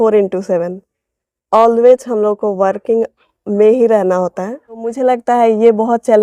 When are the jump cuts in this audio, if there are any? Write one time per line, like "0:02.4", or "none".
0:04.9

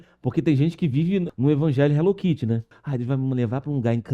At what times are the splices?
0:01.3
0:02.8

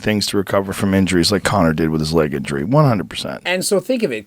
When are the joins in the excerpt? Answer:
0:03.3

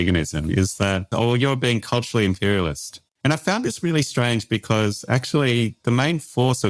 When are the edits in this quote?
0:01.1
0:03.0

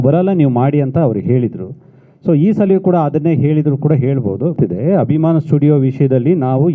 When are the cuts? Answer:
0:04.5

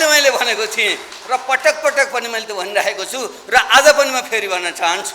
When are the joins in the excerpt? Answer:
none

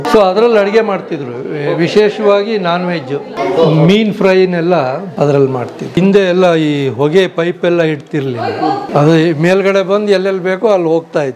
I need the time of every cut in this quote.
0:03.3
0:05.1
0:06.0
0:08.8

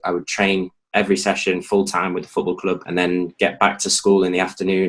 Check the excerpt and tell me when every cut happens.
0:02.8

